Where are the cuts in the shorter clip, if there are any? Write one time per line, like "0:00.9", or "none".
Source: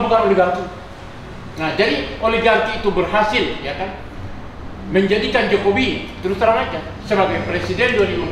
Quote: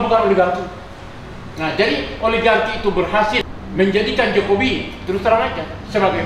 0:03.4